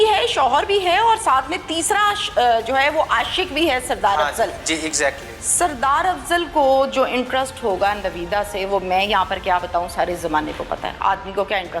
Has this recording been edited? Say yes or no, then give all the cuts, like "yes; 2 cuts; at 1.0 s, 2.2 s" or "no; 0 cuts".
no; 0 cuts